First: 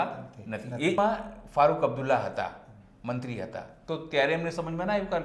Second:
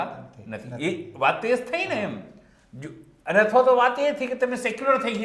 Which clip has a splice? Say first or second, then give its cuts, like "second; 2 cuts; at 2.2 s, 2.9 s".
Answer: first; 1 cut; at 1.0 s